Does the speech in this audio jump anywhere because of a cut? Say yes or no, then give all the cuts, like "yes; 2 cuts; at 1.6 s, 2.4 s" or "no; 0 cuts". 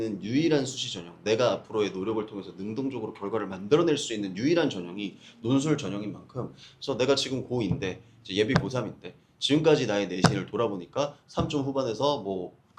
no; 0 cuts